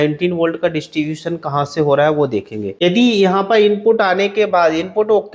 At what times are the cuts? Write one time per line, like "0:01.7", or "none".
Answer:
0:02.6